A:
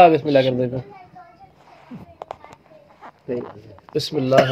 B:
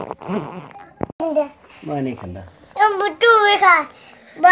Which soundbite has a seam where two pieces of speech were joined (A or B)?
B